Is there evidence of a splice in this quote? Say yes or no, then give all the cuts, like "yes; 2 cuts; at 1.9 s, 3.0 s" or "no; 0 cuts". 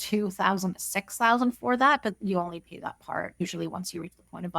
yes; 1 cut; at 3.4 s